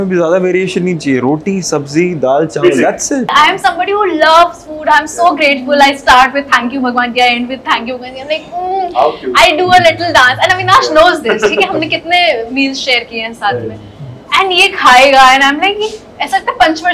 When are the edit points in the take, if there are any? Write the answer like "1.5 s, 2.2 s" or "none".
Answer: 3.2 s